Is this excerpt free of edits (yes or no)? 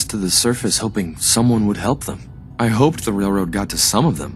yes